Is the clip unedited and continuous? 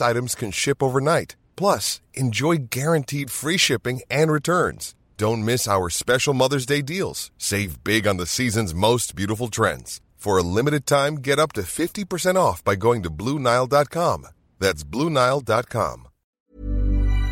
no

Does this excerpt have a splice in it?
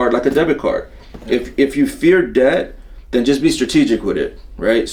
no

